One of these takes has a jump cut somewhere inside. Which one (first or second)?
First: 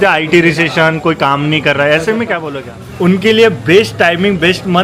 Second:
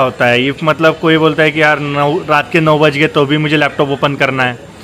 first